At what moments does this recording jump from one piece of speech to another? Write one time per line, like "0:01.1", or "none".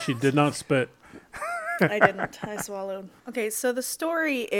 0:03.2

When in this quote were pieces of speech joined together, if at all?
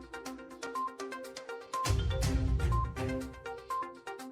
none

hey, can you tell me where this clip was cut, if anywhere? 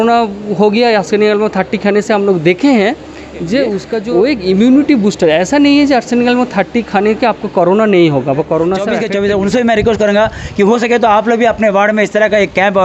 0:03.9
0:09.0

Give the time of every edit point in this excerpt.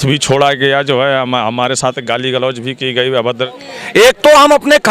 0:03.5

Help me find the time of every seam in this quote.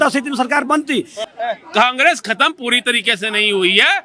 0:01.2

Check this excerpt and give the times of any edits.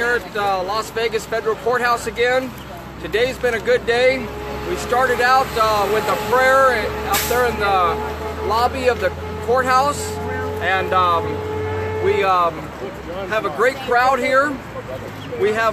0:12.3

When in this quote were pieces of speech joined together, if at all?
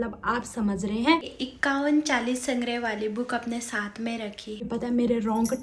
0:01.4
0:04.7

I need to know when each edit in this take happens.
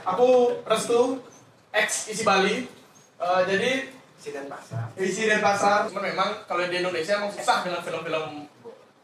0:05.9

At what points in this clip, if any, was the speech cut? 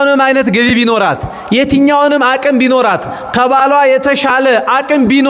none

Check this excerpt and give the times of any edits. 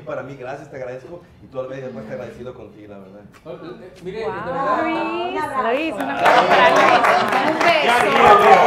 none

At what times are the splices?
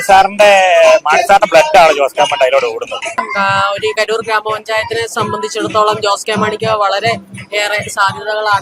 0:03.3

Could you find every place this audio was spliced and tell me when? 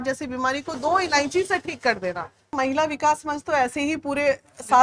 0:02.5

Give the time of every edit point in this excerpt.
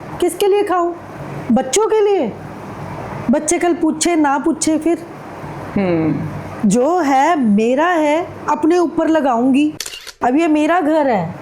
0:10.1

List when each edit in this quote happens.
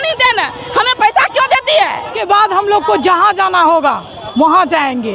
0:02.1

